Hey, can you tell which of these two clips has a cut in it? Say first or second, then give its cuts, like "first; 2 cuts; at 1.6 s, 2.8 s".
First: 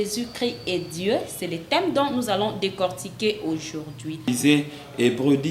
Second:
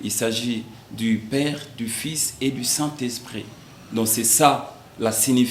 first; 1 cut; at 4.3 s